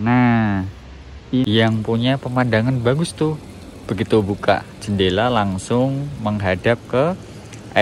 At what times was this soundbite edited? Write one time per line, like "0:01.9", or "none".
0:01.5